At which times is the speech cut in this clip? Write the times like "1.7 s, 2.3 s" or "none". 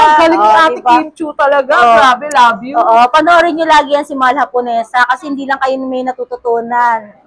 none